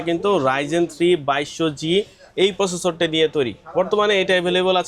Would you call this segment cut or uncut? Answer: uncut